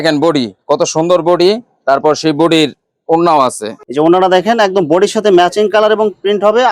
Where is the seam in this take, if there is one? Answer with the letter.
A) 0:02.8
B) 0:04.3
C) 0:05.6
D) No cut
D